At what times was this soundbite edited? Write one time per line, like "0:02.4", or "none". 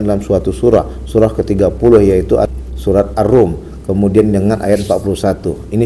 0:02.3